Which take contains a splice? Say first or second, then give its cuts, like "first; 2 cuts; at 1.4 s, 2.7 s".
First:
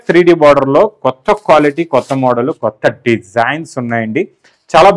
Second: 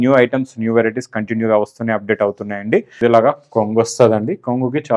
second; 1 cut; at 3.0 s